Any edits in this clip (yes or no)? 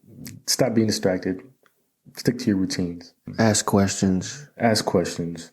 yes